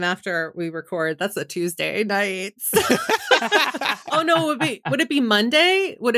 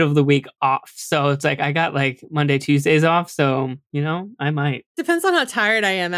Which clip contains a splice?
second; 1 cut; at 4.9 s

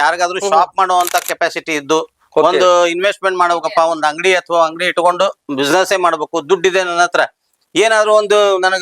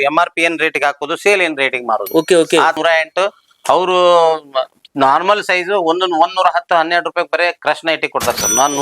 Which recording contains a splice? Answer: second; 1 cut; at 2.8 s

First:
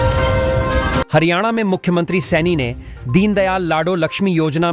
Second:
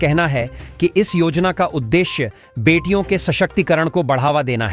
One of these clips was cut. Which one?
first; 1 cut; at 1.1 s

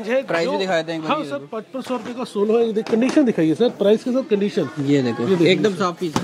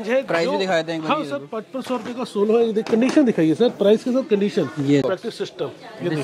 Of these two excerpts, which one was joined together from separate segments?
second; 1 cut; at 5.0 s

